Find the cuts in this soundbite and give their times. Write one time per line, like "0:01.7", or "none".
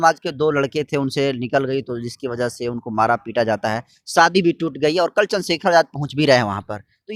none